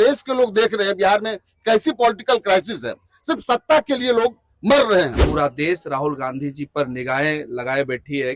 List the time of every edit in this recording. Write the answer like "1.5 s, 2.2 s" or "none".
5.2 s